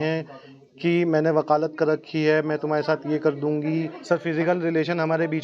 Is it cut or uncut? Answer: cut